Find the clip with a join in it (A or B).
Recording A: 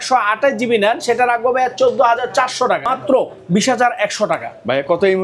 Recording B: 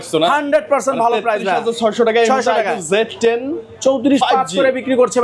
A